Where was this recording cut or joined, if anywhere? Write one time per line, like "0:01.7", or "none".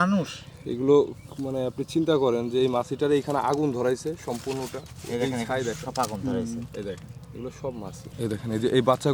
0:08.0